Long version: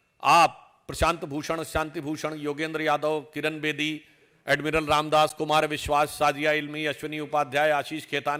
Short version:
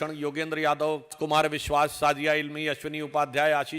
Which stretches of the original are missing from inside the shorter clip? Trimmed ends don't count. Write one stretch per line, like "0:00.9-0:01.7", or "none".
0:03.4-0:05.3